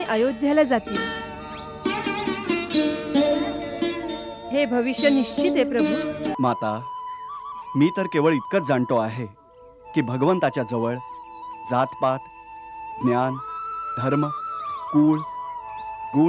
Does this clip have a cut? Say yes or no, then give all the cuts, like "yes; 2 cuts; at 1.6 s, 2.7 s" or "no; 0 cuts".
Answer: yes; 1 cut; at 6.3 s